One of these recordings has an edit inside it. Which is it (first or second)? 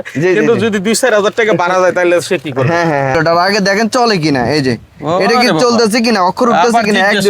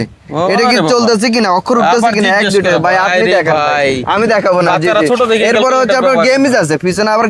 first